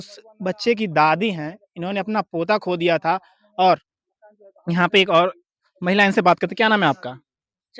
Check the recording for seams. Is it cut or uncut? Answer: uncut